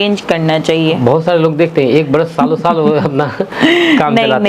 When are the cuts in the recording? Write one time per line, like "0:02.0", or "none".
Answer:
none